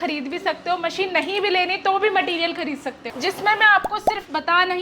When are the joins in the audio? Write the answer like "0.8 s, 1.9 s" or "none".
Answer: 3.0 s